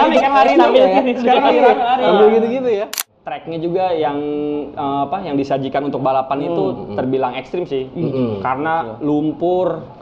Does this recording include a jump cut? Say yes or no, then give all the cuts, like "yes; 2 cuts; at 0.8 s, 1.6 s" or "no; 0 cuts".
yes; 1 cut; at 3.0 s